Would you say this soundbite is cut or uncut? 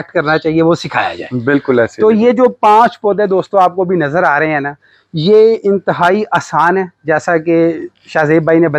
uncut